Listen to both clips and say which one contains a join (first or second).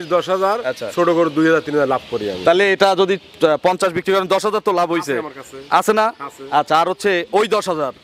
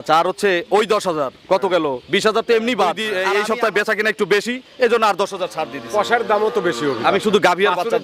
second